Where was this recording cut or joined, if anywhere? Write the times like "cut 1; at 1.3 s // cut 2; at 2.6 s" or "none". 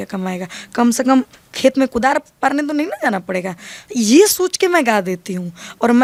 none

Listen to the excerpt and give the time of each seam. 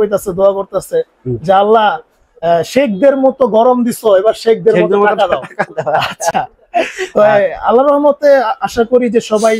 none

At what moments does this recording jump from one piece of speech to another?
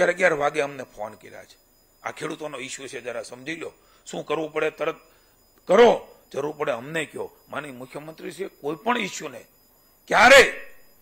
none

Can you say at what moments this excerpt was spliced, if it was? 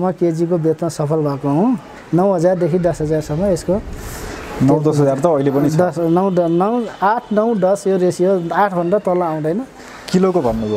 cut 1; at 1.9 s

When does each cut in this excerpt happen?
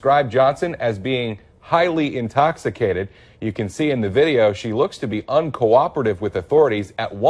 none

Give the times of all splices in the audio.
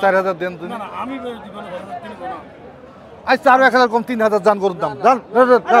none

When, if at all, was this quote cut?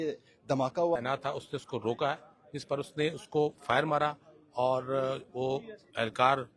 none

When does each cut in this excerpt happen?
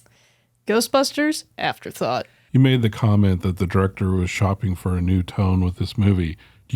cut 1; at 2.4 s

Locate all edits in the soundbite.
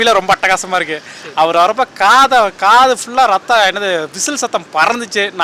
none

